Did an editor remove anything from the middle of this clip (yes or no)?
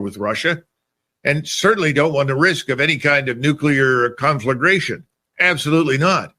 no